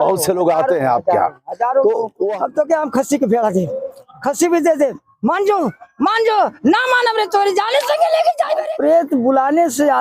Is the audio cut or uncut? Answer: cut